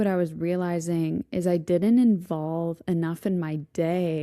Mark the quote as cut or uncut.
uncut